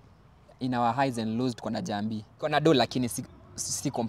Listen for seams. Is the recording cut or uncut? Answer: cut